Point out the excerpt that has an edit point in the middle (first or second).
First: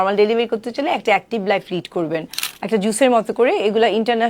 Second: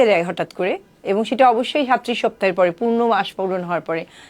first